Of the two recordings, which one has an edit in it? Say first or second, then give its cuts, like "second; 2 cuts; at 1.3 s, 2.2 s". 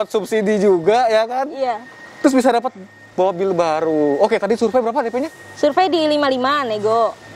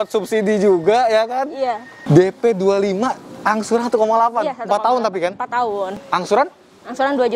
second; 2 cuts; at 1.9 s, 6.0 s